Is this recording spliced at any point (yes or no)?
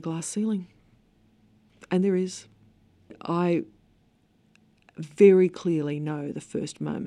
yes